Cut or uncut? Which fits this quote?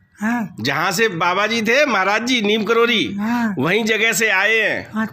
uncut